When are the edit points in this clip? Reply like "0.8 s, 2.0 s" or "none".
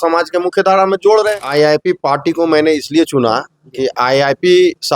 1.4 s